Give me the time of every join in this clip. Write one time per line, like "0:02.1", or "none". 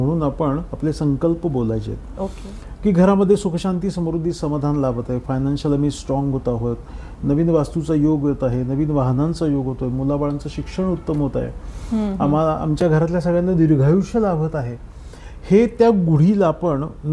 none

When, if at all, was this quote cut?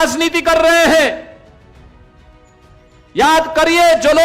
0:01.4
0:03.1

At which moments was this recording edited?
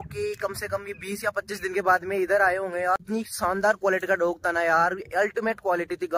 0:03.0

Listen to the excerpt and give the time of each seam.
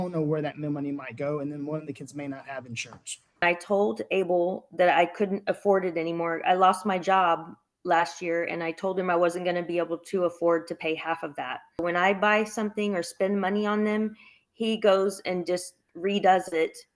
0:03.4
0:11.8

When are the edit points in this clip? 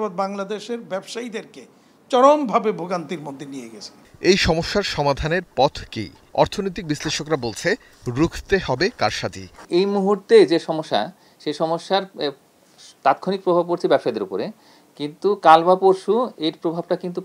none

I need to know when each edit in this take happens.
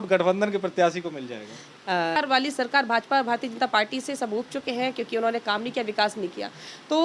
0:02.2

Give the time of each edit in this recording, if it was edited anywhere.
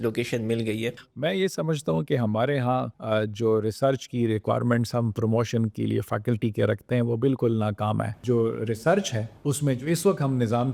0:01.0
0:02.9
0:08.2
0:09.2

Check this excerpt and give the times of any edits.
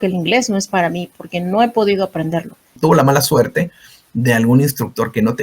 0:02.8

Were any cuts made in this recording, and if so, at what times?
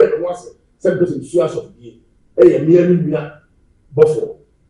none

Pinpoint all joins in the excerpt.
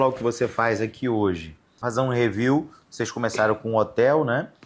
0:01.8

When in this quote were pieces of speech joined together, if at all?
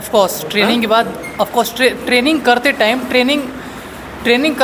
none

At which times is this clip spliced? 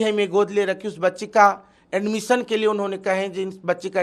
none

